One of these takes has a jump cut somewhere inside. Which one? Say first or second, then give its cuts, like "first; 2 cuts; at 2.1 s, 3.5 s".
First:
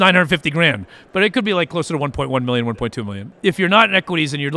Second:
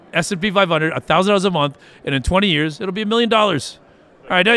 first; 1 cut; at 3.2 s